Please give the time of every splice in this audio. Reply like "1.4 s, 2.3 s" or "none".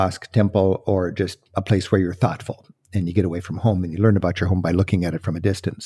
none